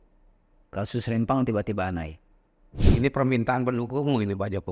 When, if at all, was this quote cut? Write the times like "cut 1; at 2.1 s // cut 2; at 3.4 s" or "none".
cut 1; at 2.8 s